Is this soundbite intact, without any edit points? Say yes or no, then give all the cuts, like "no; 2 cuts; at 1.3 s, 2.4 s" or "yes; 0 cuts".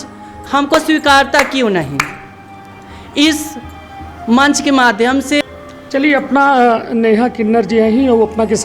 no; 1 cut; at 5.5 s